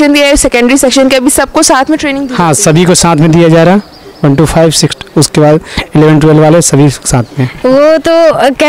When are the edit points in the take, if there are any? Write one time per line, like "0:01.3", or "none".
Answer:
0:07.4